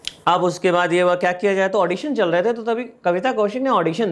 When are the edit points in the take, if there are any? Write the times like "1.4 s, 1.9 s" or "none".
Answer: none